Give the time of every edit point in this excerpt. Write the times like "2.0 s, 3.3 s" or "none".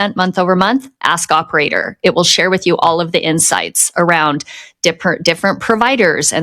none

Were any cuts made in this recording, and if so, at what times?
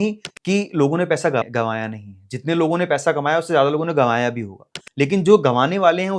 1.4 s

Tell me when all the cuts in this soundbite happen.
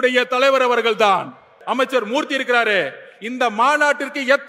1.6 s

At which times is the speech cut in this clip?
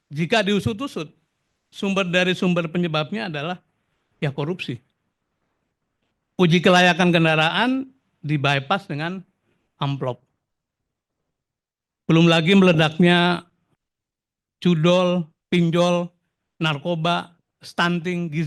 none

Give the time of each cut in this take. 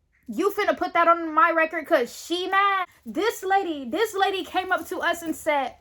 2.8 s

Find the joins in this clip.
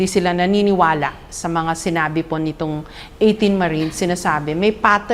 none

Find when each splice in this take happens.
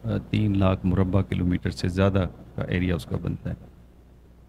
none

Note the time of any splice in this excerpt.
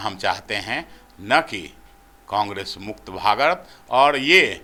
none

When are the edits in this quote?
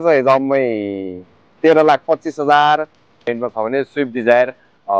3.2 s

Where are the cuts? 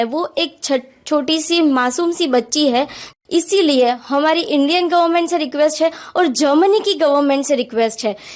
3.1 s

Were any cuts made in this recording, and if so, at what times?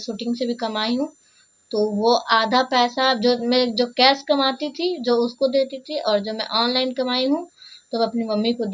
none

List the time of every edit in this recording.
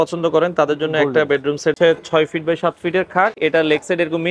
1.8 s, 3.4 s

